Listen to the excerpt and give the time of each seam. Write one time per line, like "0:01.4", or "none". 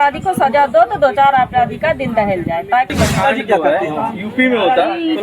0:02.9